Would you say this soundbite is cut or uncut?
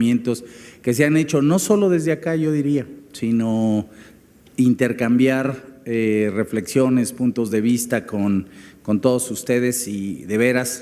cut